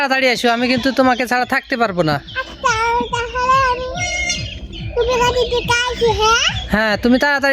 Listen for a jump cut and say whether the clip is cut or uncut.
uncut